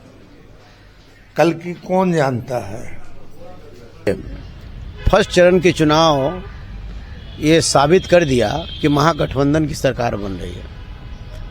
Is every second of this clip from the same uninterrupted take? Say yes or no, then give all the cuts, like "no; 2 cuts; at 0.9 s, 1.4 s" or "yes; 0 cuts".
no; 1 cut; at 4.1 s